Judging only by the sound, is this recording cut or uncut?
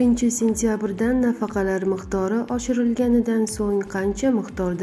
uncut